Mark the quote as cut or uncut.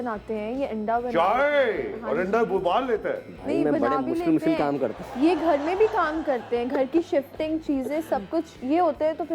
uncut